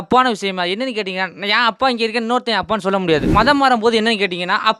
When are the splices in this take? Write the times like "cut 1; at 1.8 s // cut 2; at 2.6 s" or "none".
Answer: cut 1; at 3.3 s